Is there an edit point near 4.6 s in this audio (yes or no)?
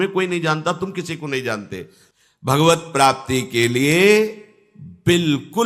no